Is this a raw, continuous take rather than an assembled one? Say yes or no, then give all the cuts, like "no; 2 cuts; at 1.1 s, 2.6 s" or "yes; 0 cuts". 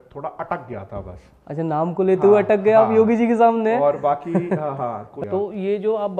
no; 1 cut; at 5.1 s